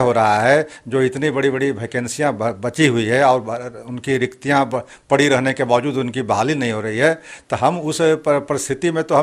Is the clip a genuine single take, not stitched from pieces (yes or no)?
yes